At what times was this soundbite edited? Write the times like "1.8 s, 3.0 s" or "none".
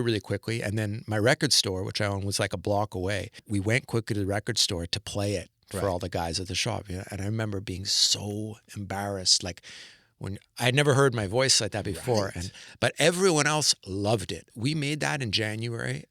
3.4 s, 14.5 s